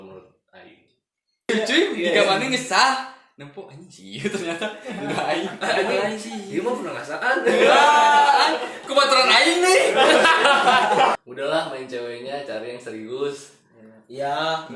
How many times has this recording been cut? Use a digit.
2